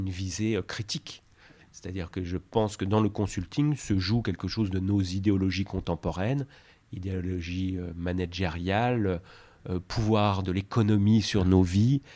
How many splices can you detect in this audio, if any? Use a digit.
0